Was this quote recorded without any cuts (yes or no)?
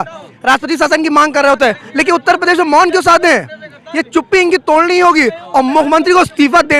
yes